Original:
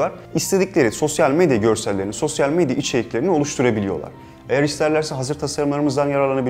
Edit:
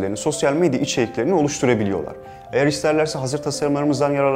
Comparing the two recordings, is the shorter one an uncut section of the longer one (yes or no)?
yes